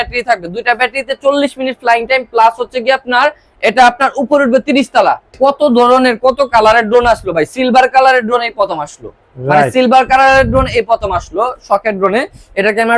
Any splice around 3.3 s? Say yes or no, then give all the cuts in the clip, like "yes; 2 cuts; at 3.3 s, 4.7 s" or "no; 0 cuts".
no; 1 cut; at 5.3 s